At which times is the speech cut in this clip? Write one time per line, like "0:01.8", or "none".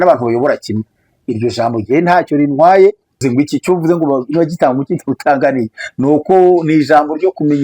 0:03.2